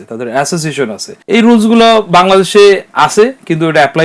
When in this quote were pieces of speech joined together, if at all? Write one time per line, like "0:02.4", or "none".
0:01.0